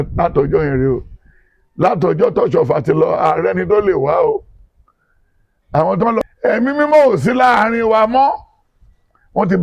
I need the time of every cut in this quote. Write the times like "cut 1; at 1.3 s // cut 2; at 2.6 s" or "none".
cut 1; at 6.3 s